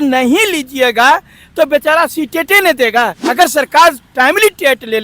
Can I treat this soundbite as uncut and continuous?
no; 1 cut; at 3.2 s

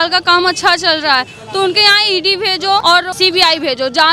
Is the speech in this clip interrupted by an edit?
yes; 1 cut; at 3.0 s

